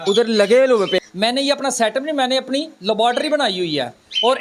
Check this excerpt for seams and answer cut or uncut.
cut